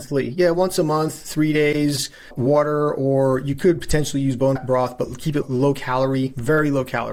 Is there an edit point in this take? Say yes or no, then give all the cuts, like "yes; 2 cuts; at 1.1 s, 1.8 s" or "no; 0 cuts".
no; 0 cuts